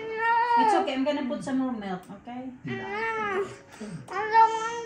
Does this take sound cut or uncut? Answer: uncut